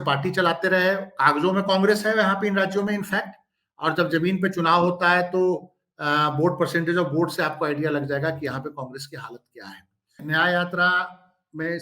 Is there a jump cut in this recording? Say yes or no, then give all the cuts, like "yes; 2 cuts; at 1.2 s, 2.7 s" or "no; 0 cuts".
yes; 1 cut; at 10.2 s